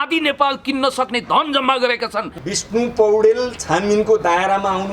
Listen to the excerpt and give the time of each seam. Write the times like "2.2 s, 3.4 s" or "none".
2.4 s